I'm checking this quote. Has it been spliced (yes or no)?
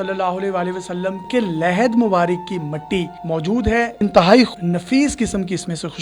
yes